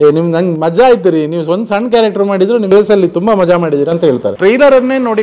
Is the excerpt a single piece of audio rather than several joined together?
no; 2 cuts; at 2.7 s, 4.3 s

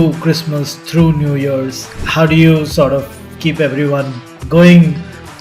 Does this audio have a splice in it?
yes; 1 cut; at 4.4 s

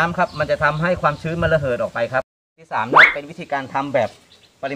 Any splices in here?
yes; 1 cut; at 2.6 s

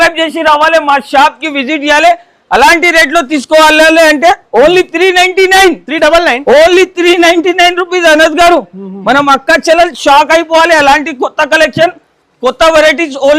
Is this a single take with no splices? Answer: yes; 0 cuts

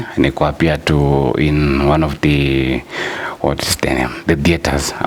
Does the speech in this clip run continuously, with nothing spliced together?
yes; 0 cuts

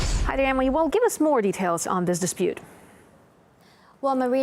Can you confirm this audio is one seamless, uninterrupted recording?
no; 1 cut; at 3.0 s

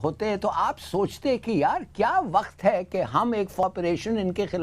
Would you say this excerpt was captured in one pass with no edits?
no; 1 cut; at 3.6 s

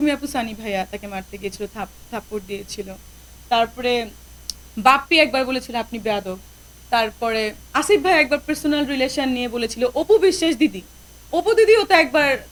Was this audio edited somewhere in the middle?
no; 0 cuts

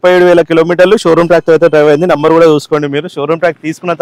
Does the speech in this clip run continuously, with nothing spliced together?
yes; 0 cuts

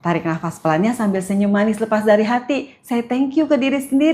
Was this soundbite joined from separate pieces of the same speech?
yes; 1 cut; at 1.7 s

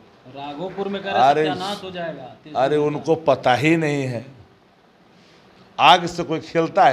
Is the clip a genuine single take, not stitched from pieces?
yes; 0 cuts

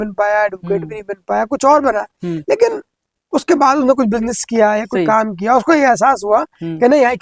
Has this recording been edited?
no; 0 cuts

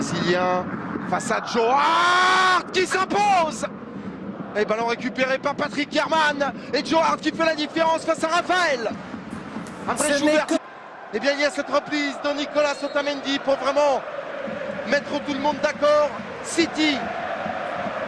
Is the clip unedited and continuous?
yes; 0 cuts

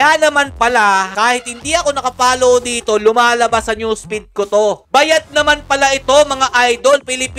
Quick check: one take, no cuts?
no; 1 cut; at 1.1 s

